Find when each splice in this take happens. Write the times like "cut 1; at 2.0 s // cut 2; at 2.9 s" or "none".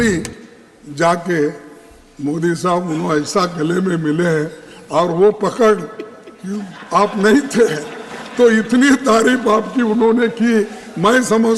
none